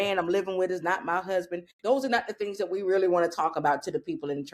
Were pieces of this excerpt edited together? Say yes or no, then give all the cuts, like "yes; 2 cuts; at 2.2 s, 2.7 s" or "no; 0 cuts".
yes; 1 cut; at 1.7 s